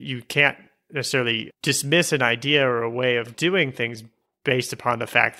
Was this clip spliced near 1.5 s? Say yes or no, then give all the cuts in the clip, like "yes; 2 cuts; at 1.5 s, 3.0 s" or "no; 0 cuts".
no; 1 cut; at 3.3 s